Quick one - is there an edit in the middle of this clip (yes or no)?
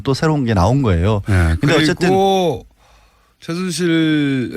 yes